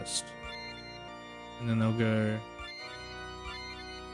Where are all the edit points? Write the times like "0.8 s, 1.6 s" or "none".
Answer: 1.1 s